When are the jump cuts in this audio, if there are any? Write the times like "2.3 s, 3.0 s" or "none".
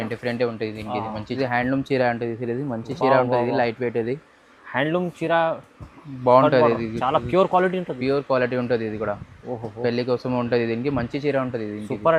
1.3 s